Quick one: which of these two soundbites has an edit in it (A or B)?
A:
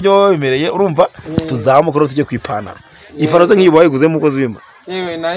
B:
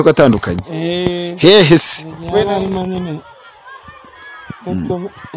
B